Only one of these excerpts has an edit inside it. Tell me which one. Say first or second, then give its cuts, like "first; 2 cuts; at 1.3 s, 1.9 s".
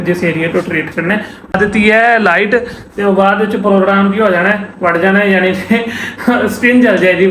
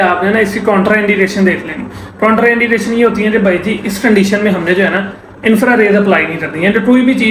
first; 1 cut; at 1.5 s